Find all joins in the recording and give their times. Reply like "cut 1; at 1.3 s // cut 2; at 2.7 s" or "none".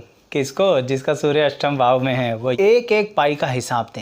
cut 1; at 2.5 s